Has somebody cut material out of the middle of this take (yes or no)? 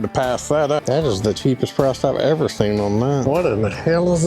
yes